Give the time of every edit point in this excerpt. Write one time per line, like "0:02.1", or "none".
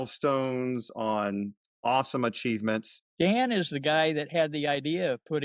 0:03.0